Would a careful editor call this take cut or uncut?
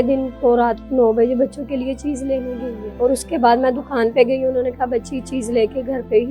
cut